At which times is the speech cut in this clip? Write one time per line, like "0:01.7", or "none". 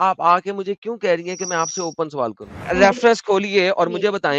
0:02.5